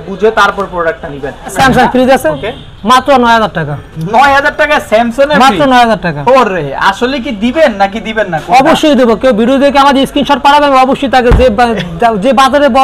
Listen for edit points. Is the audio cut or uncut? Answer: cut